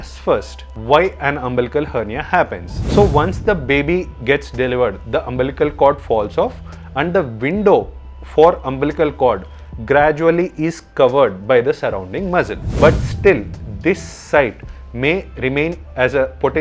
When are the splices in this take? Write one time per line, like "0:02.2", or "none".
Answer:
0:02.8
0:12.6